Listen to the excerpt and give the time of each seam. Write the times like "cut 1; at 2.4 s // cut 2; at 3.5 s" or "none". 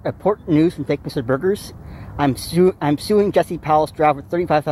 cut 1; at 3.3 s